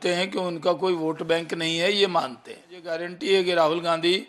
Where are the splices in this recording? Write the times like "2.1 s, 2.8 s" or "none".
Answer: 3.0 s

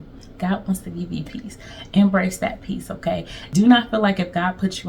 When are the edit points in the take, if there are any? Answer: 3.4 s

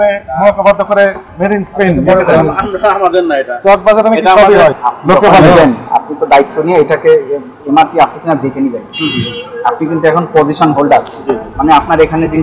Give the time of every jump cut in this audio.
4.9 s

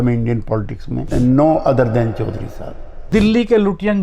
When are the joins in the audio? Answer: 1.1 s, 3.1 s

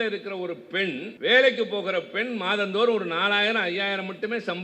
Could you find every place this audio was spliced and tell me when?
1.1 s

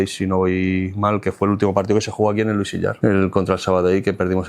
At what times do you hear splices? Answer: 3.0 s

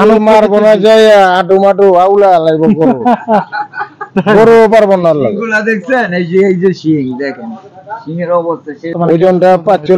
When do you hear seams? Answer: 8.9 s

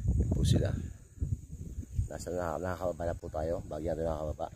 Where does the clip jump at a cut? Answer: none

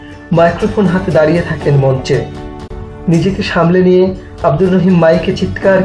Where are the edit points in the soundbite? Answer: 2.8 s

